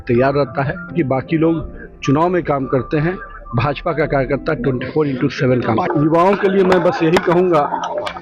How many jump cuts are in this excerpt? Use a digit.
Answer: 2